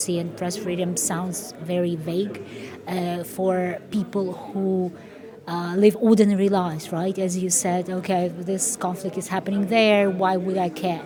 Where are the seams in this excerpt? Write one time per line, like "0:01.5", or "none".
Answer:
none